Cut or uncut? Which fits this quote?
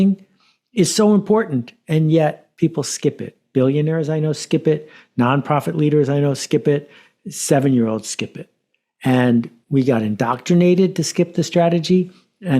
cut